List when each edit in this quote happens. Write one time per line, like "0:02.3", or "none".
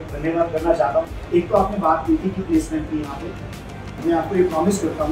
0:01.1
0:03.9